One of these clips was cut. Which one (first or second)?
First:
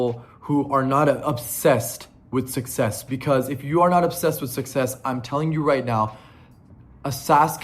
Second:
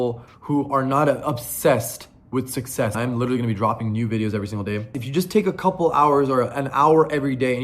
second